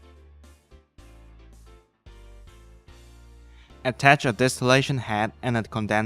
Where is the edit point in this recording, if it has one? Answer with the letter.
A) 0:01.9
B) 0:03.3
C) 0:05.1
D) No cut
D